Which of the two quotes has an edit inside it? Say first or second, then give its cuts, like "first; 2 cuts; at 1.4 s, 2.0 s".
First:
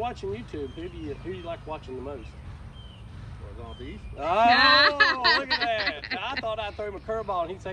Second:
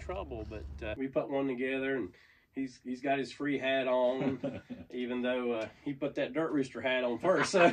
second; 1 cut; at 0.9 s